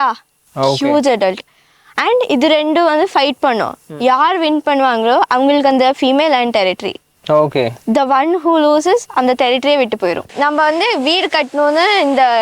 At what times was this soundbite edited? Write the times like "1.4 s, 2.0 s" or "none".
10.3 s